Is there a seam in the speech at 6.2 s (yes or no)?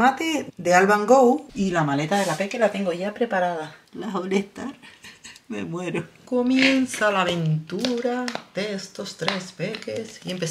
yes